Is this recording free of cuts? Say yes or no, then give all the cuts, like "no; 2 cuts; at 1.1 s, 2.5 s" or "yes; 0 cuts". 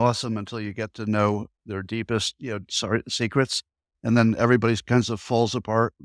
yes; 0 cuts